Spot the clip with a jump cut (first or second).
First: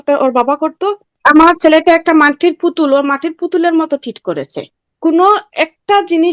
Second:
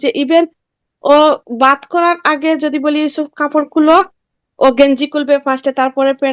first